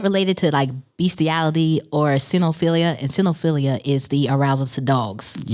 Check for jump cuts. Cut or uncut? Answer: uncut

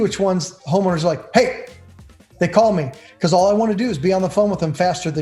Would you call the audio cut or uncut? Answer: uncut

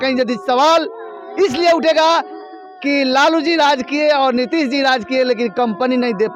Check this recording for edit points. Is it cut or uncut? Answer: uncut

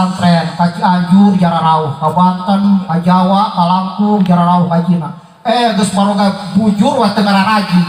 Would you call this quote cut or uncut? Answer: uncut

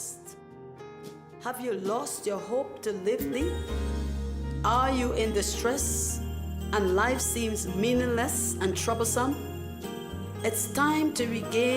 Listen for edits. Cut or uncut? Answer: cut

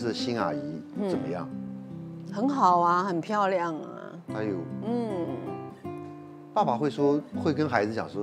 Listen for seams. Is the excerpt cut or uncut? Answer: uncut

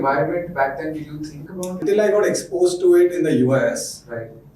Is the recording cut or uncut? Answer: cut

